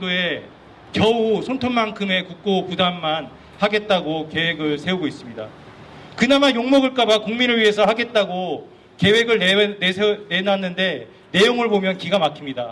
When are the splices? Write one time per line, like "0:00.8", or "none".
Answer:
0:05.3